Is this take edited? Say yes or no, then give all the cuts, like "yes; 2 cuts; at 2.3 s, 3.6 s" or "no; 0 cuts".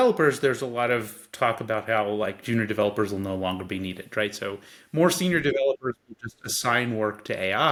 no; 0 cuts